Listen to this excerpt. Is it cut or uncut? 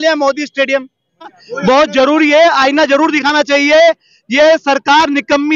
cut